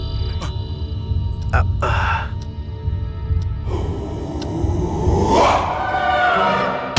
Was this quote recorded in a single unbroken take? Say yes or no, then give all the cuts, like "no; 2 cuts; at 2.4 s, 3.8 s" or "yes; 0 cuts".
yes; 0 cuts